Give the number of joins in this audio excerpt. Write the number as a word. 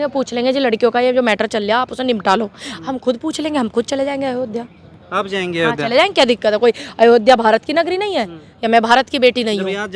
zero